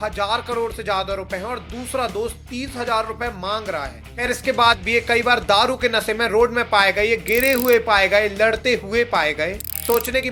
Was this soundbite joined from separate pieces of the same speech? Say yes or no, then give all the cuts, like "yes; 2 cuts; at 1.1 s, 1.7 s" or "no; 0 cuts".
no; 0 cuts